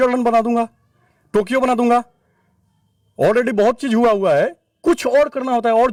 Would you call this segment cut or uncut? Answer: uncut